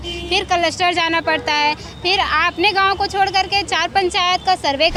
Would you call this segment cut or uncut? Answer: uncut